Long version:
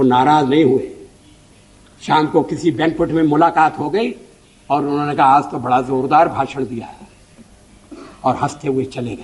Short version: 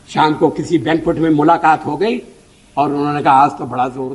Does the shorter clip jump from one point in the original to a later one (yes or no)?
no